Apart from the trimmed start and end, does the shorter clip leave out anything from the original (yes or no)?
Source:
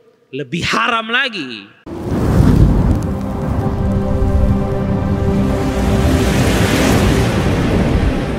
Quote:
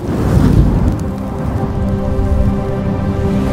no